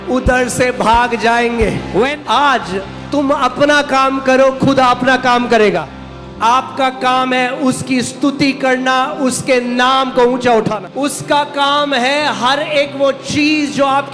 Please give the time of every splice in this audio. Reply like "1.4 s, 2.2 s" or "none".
2.2 s, 5.9 s, 10.8 s

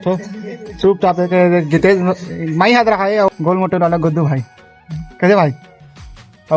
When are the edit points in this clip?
1.1 s, 3.3 s, 5.0 s

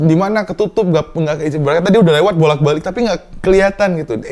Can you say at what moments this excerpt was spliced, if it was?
none

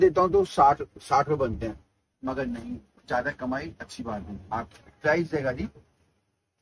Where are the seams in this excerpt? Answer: 4.7 s

